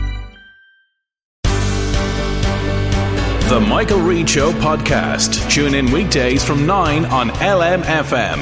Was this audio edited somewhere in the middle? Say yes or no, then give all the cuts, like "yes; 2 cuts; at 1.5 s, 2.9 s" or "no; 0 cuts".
yes; 1 cut; at 1.3 s